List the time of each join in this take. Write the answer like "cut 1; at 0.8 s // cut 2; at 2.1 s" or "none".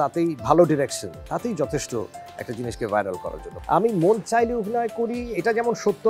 cut 1; at 3.4 s